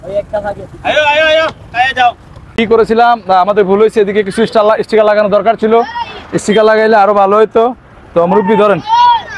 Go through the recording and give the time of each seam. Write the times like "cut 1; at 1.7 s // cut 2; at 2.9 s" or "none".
cut 1; at 2.6 s